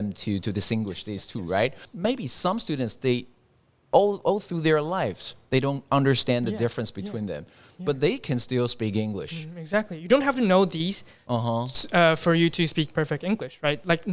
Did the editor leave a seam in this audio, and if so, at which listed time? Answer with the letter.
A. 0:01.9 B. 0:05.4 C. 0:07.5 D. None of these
A